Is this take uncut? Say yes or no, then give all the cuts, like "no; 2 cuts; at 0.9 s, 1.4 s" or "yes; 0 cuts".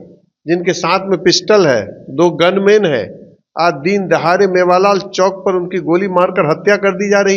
yes; 0 cuts